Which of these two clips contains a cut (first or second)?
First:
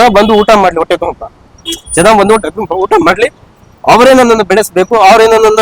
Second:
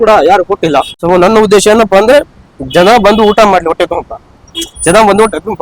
second